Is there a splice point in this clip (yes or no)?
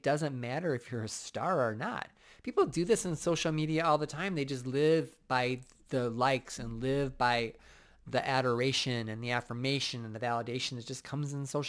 no